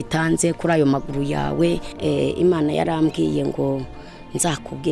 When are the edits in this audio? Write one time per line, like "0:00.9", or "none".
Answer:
0:01.9